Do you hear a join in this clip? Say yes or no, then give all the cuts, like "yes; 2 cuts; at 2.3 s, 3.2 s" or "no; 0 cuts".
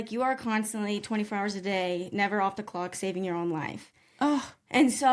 no; 0 cuts